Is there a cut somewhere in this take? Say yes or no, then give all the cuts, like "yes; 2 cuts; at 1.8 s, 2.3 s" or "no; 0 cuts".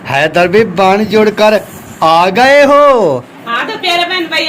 yes; 1 cut; at 3.3 s